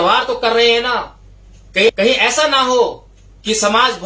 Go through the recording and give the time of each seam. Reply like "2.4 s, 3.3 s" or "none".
none